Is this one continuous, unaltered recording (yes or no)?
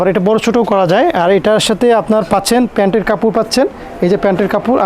yes